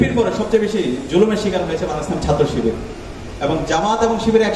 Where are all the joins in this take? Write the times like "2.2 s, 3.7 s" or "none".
none